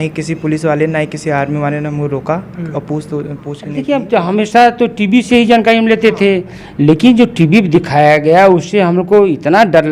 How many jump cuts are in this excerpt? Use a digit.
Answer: 1